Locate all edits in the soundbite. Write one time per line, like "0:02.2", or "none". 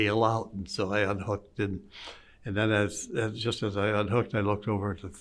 none

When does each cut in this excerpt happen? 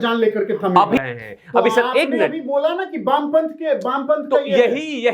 0:01.0

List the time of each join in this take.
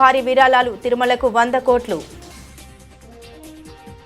0:02.1

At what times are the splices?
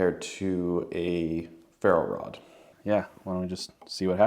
0:02.7

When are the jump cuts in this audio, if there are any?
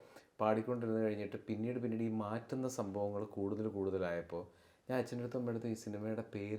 none

